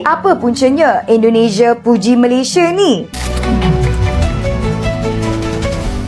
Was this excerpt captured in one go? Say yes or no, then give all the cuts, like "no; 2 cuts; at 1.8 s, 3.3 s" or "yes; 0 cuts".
yes; 0 cuts